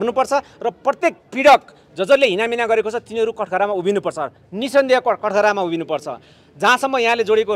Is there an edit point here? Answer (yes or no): no